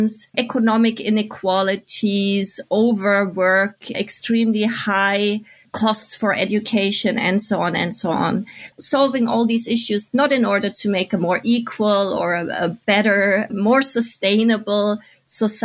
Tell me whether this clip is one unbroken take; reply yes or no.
yes